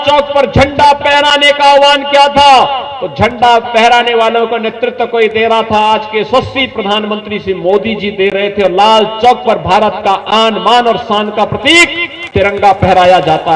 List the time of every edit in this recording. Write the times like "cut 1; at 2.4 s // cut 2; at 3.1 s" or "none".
none